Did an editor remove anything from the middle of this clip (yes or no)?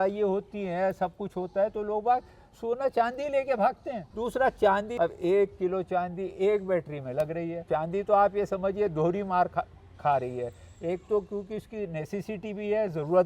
yes